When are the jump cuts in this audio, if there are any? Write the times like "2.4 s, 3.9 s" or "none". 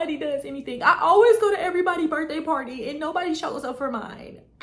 none